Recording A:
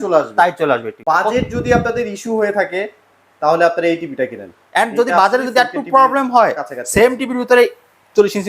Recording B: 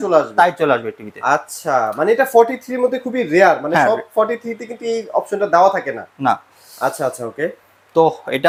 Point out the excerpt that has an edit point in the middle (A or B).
A